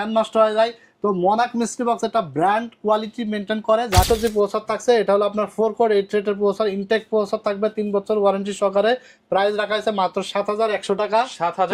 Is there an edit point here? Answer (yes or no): yes